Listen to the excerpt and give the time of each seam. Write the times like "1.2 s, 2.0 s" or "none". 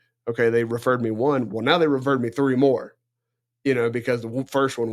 none